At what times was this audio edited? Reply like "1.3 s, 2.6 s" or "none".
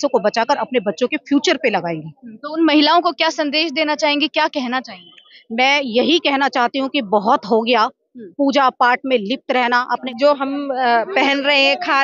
10.1 s